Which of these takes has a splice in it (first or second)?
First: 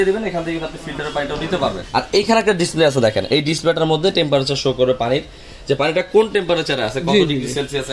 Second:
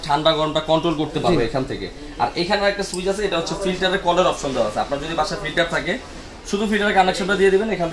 first